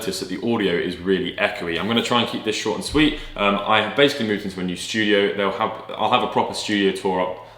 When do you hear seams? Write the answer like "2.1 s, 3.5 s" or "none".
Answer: none